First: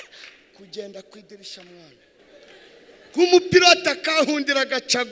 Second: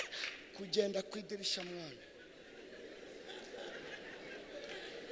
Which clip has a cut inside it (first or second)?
first